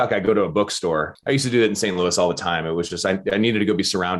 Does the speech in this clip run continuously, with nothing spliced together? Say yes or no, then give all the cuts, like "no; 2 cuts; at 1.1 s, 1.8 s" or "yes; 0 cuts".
no; 1 cut; at 1.1 s